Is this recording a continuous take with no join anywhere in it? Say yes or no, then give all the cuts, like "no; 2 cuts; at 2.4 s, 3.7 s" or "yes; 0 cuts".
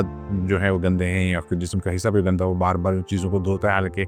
yes; 0 cuts